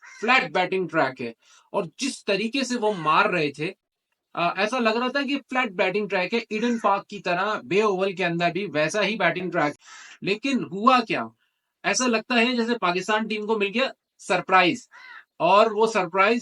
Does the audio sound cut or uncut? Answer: cut